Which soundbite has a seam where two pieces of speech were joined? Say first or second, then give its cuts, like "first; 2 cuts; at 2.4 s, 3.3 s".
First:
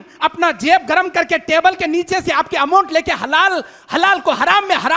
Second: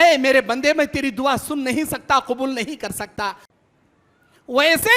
second; 1 cut; at 3.4 s